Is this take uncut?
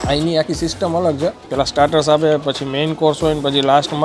no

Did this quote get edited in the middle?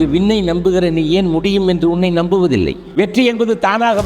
yes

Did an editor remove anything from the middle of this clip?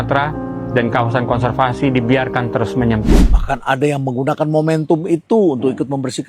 yes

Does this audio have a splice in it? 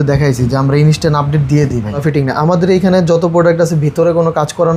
yes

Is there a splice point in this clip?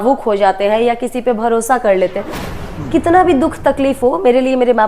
yes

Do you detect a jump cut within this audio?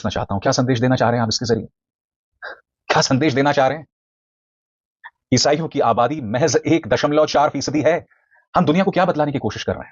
no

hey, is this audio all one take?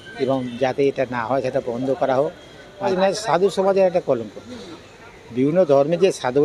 no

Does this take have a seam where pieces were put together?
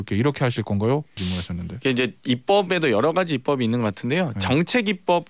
yes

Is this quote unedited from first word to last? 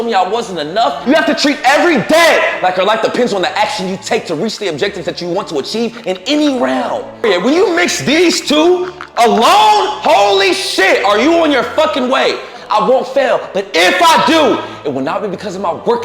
no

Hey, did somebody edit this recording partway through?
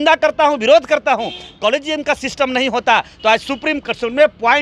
no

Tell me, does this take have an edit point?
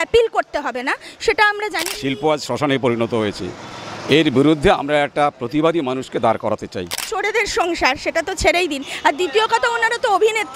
yes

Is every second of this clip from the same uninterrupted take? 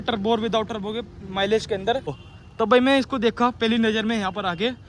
no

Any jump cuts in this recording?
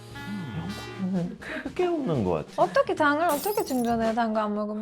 no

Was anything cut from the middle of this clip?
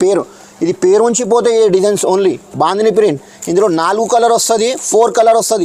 no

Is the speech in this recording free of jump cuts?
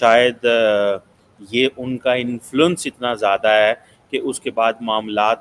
yes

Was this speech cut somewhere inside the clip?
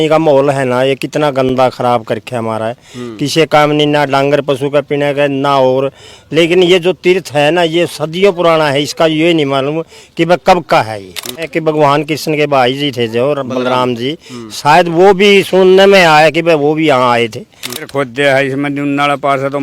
yes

